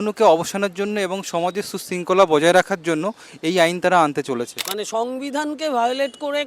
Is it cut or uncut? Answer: cut